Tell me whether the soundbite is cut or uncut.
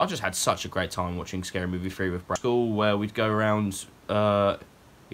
cut